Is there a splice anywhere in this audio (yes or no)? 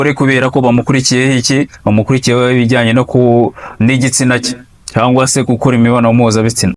no